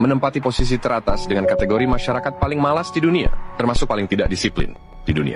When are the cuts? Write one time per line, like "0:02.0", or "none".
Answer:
none